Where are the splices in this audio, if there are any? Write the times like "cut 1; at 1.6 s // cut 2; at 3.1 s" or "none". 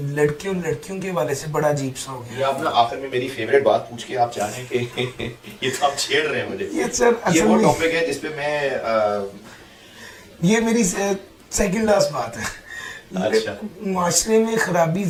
none